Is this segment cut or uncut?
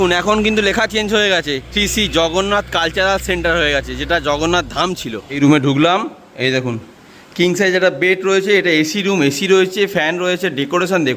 cut